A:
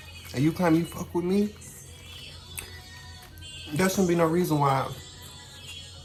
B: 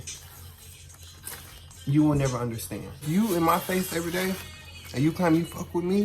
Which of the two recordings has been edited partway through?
B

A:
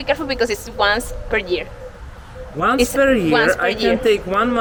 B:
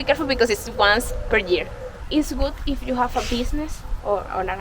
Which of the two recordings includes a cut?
B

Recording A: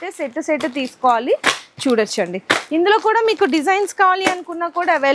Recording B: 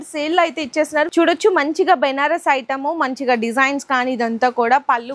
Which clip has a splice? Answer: B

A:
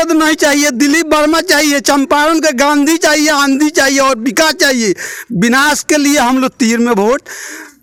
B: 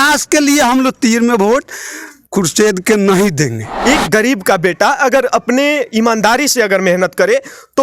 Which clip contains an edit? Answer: B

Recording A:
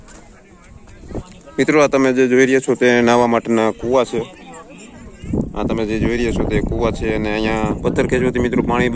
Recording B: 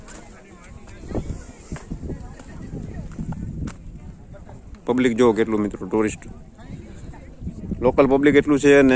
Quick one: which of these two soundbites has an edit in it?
A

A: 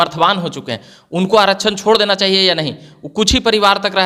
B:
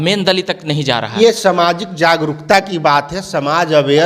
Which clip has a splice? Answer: B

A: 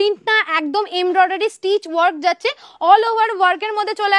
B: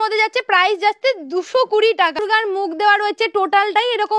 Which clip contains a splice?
B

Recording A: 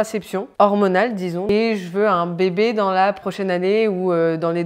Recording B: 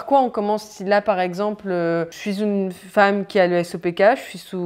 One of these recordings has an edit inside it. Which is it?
A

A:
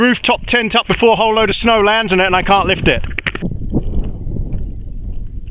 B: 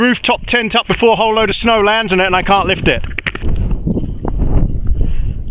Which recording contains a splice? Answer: B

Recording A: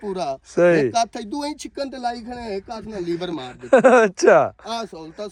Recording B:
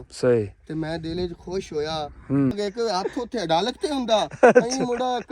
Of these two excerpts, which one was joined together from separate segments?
B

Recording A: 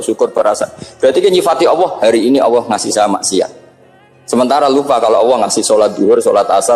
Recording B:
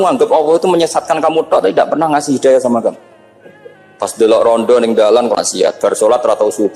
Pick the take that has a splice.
B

